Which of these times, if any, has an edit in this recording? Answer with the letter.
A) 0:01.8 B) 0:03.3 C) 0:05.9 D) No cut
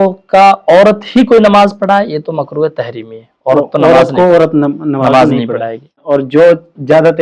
C